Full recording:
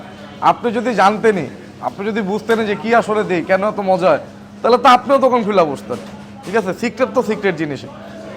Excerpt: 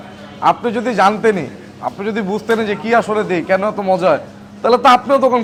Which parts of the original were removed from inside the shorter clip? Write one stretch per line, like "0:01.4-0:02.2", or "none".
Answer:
none